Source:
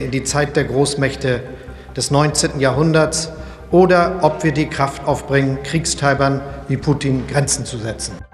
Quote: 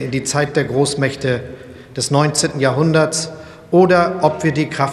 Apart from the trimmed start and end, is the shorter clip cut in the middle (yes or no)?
no